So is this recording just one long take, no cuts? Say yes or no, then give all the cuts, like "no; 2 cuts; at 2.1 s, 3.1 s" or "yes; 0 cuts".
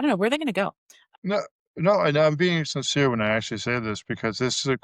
no; 1 cut; at 1.1 s